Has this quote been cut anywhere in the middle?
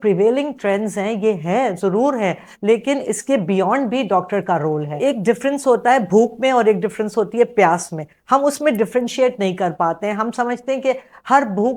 yes; 1 cut; at 4.9 s

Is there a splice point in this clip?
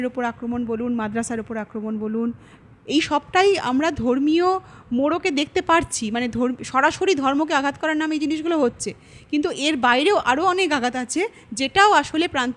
no; 0 cuts

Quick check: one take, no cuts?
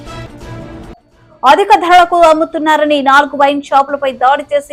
yes; 0 cuts

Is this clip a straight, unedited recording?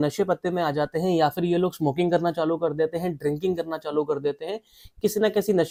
yes; 0 cuts

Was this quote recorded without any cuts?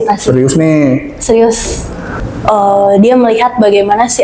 no; 1 cut; at 2.3 s

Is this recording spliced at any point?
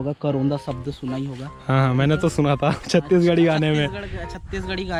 no; 0 cuts

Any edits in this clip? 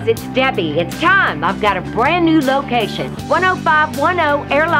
no; 0 cuts

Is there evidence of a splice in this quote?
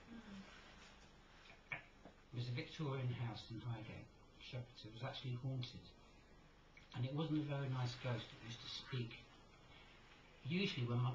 no; 0 cuts

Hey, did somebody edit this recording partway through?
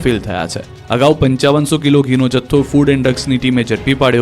yes; 1 cut; at 2.0 s

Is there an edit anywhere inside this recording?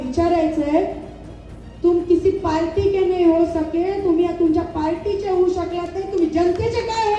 no; 0 cuts

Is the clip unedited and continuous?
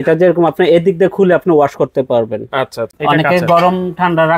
no; 1 cut; at 2.9 s

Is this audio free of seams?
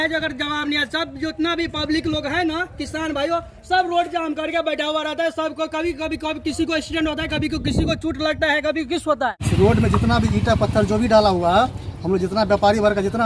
no; 1 cut; at 9.4 s

